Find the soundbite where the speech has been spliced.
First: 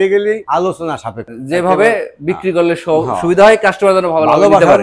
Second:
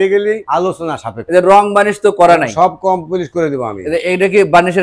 second; 1 cut; at 1.1 s

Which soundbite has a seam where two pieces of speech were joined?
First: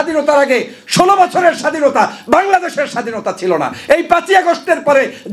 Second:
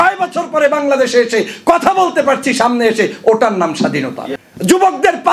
second; 1 cut; at 4.2 s

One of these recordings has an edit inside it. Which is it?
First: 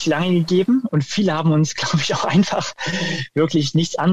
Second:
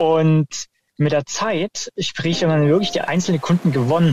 second; 1 cut; at 3.0 s

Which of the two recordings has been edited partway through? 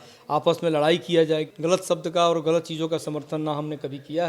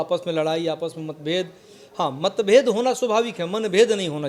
first; 1 cut; at 1.5 s

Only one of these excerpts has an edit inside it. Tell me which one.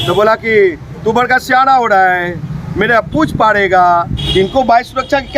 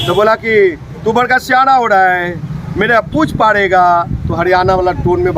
first; 1 cut; at 4.2 s

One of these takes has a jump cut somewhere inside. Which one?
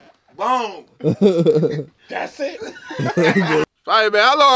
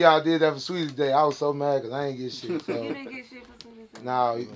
first; 1 cut; at 3.6 s

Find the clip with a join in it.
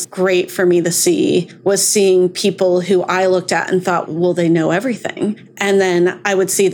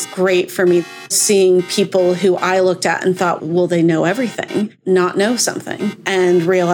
second; 2 cuts; at 1.1 s, 4.8 s

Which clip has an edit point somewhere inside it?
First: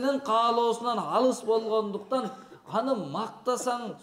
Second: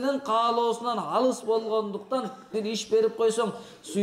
second; 1 cut; at 2.5 s

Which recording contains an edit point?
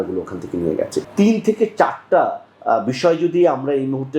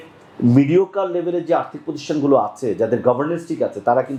first; 1 cut; at 1.0 s

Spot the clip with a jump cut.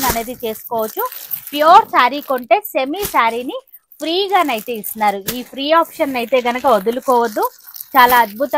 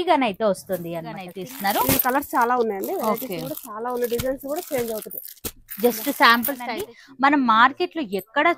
second; 2 cuts; at 1.3 s, 6.6 s

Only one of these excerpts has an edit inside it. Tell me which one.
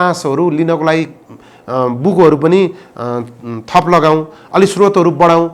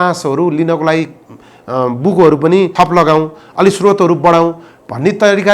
second; 1 cut; at 2.7 s

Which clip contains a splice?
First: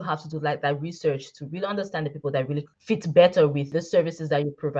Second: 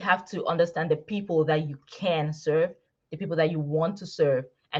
first; 2 cuts; at 2.7 s, 3.6 s

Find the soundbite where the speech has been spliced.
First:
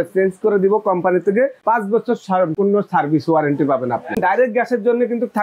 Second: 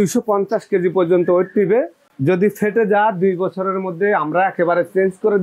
first; 3 cuts; at 1.6 s, 2.5 s, 4.2 s

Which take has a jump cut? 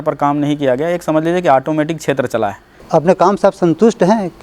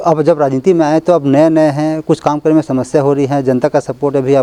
first; 1 cut; at 2.7 s

